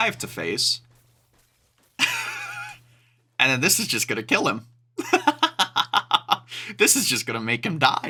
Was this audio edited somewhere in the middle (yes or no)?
no